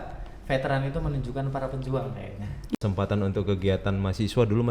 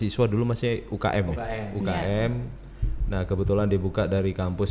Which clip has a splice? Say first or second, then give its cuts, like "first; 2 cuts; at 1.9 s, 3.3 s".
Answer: first; 1 cut; at 2.7 s